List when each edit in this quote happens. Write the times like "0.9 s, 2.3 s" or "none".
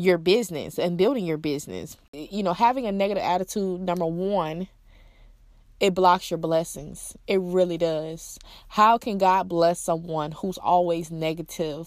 2.2 s